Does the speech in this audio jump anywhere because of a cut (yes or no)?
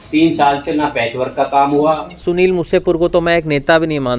yes